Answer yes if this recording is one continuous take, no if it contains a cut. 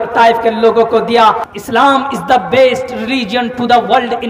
no